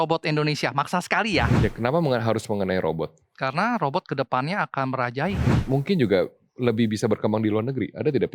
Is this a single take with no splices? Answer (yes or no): no